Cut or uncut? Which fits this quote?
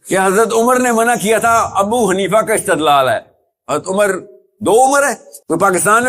uncut